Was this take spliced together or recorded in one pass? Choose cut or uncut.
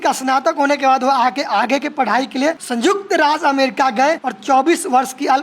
cut